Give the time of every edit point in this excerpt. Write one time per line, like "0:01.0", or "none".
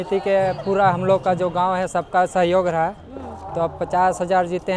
none

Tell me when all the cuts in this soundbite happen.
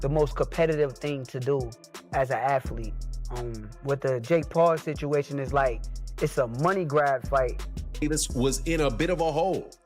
0:08.0

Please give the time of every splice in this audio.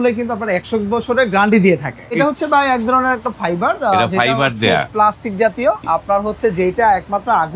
0:02.2
0:05.8

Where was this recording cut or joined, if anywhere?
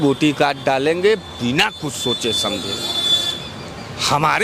none

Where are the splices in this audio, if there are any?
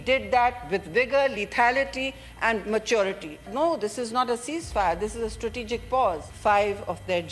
0:03.4
0:06.3

